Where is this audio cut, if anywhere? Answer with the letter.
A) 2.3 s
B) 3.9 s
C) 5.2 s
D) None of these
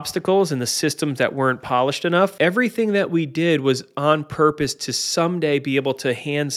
A